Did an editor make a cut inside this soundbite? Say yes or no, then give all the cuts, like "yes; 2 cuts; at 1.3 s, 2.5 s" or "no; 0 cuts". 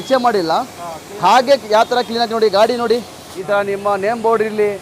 yes; 1 cut; at 3.3 s